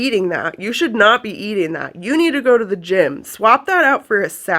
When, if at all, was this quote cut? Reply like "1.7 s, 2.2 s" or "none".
none

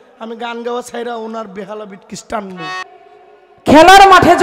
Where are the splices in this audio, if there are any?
2.9 s

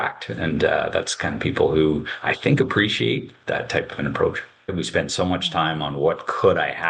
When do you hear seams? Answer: 4.7 s

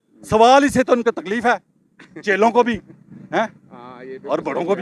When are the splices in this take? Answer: none

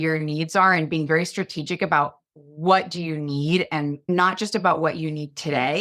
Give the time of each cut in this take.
1.1 s, 2.4 s, 4.1 s

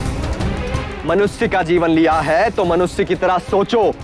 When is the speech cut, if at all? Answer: 1.0 s

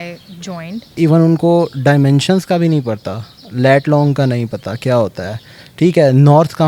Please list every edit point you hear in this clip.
0.9 s

